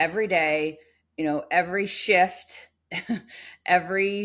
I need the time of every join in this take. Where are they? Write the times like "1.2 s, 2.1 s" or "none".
none